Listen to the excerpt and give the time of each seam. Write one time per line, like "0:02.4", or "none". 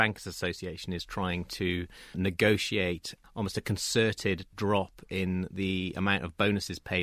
0:03.1